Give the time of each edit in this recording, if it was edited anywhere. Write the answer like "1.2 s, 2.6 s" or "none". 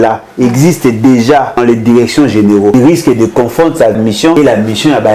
1.5 s, 2.7 s, 4.0 s